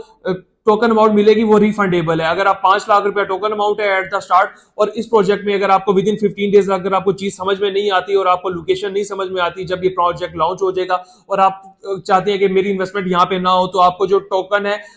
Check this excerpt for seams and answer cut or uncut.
uncut